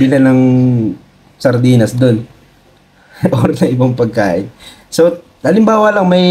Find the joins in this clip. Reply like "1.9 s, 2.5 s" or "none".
none